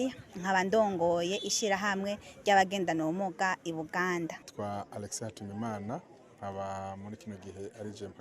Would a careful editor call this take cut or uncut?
cut